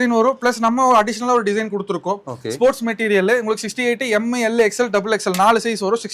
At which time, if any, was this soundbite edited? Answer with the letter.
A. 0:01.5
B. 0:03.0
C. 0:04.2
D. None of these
D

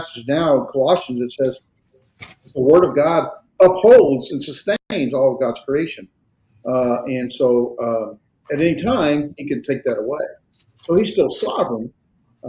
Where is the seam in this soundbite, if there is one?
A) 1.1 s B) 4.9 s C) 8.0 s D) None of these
D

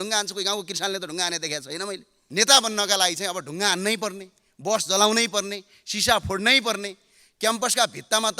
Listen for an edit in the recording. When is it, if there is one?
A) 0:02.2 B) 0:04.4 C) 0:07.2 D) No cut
A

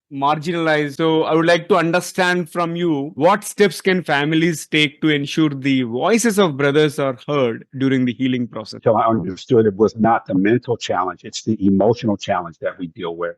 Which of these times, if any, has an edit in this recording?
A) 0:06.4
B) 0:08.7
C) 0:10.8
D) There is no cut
B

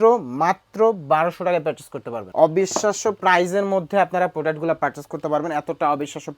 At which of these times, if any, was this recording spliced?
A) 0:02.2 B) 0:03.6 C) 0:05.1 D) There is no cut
A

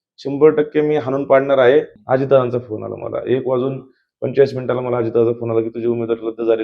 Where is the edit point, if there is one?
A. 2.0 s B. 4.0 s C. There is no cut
A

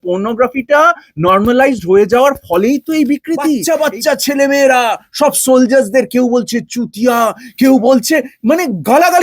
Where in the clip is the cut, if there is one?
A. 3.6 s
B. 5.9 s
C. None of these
A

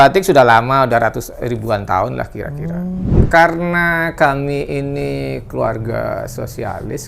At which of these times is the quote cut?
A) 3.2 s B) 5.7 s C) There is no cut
A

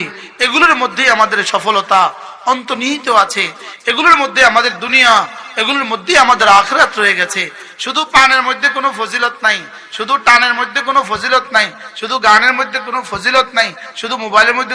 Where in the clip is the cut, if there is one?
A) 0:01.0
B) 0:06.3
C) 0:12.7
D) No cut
D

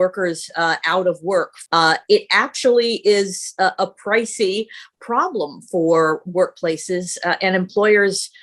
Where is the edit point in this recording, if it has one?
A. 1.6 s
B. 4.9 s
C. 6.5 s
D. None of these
A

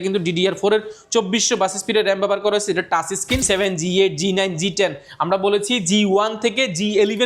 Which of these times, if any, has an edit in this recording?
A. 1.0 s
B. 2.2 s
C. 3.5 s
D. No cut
C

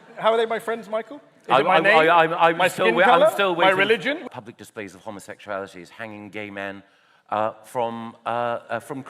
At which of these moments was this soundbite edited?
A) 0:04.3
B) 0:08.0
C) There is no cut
A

